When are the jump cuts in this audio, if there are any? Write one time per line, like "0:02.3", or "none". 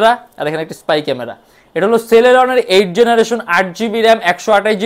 none